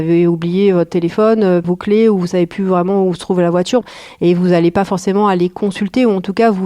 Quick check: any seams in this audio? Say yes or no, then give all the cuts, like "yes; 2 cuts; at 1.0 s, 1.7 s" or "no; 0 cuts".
yes; 2 cuts; at 1.7 s, 3.8 s